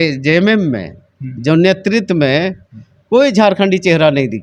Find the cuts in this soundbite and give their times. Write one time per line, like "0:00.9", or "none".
none

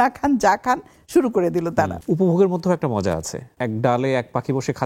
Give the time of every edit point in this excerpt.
0:02.0
0:03.5

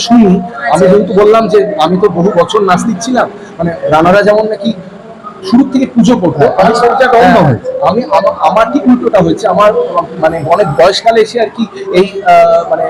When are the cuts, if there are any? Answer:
none

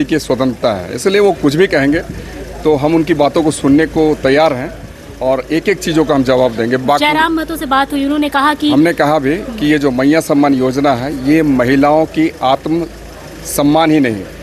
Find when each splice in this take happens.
none

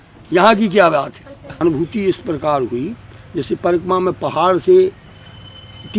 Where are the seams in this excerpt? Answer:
0:01.6

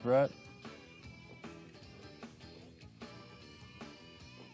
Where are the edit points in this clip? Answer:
0:01.7

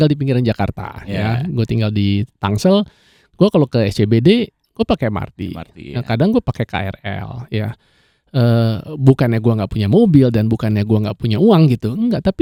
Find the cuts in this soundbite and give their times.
none

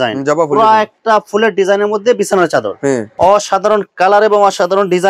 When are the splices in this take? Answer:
0:03.1

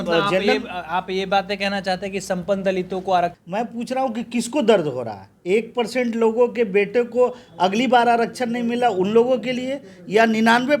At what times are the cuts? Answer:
0:03.4

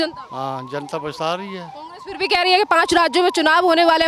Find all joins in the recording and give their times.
none

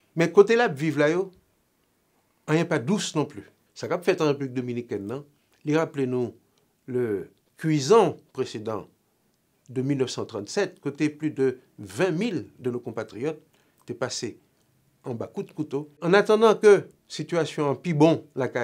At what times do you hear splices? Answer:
0:03.7
0:16.0

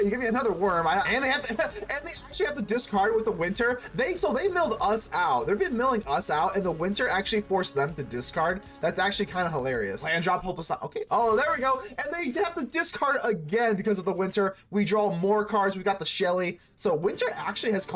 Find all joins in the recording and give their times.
0:01.1
0:10.0

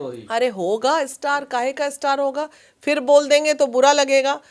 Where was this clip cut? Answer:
none

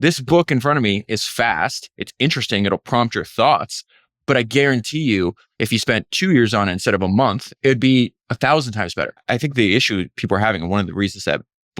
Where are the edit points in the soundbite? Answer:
0:07.5
0:08.2
0:09.2

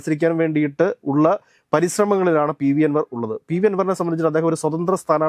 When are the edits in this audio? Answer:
none

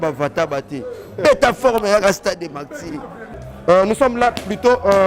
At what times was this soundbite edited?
0:03.2

